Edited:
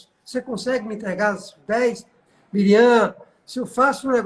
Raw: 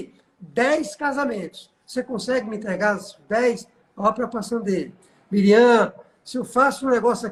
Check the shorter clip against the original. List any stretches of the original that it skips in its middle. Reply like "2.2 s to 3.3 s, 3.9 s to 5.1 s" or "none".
3.8 s to 5.0 s

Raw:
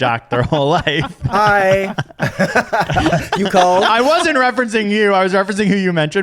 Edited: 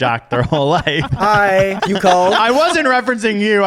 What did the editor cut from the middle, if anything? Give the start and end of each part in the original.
1.1 s to 1.2 s, 1.9 s to 3.3 s

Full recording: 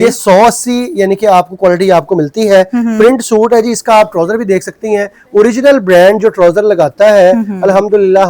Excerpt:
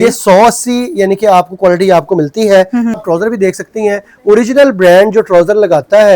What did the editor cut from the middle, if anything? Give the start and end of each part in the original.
3.0 s to 4.0 s

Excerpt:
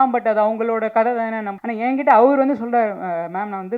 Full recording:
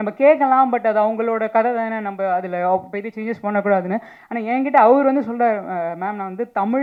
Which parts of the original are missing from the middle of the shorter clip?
2.1 s to 4.2 s

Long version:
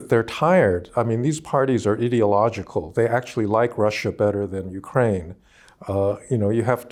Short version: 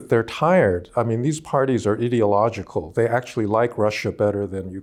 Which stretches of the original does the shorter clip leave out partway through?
none

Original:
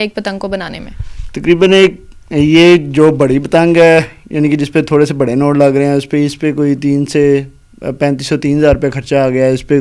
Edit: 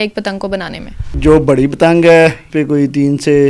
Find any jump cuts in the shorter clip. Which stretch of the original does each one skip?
1.2 s to 2.9 s, 4.2 s to 6.4 s

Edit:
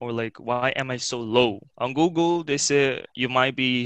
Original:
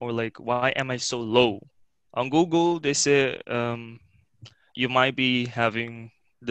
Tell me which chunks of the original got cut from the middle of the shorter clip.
1.7 s to 2.0 s, 3.4 s to 4.7 s

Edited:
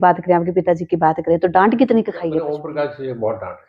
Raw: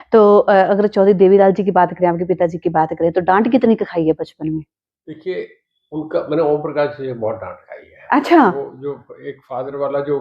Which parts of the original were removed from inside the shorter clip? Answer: 4.2 s to 6.5 s

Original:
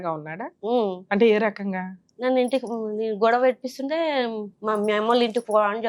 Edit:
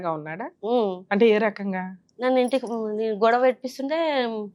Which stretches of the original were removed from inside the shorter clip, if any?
none

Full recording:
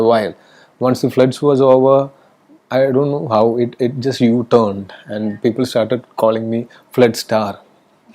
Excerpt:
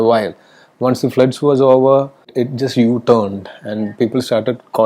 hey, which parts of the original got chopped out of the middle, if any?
2.3 s to 3.7 s

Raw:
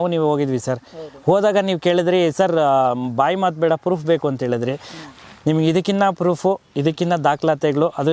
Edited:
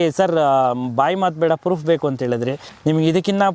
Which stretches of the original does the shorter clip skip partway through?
4.9 s to 5.3 s

